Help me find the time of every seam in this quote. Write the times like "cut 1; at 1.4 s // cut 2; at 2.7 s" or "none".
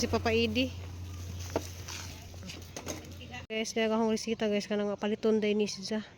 cut 1; at 3.5 s